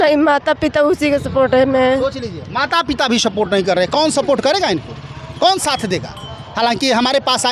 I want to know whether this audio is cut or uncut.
uncut